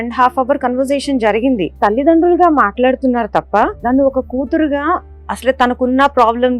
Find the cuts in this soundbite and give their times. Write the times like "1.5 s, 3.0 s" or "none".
1.7 s, 3.8 s